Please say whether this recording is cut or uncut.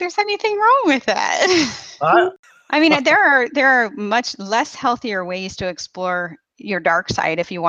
cut